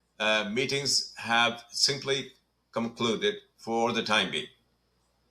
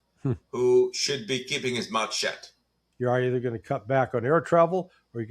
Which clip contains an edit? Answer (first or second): second